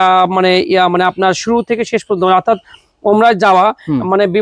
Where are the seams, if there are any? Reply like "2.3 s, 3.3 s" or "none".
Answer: none